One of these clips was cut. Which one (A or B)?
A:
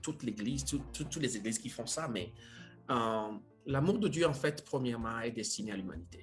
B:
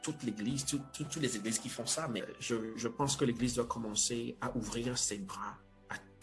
B